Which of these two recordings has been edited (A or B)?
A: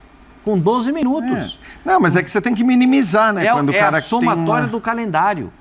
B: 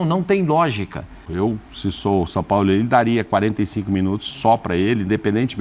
B